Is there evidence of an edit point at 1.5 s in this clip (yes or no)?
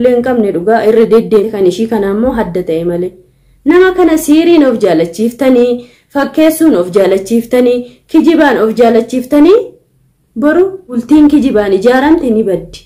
yes